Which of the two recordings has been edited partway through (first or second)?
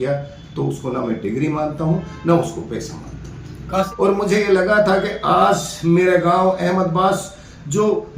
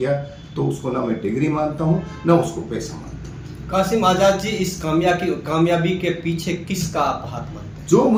first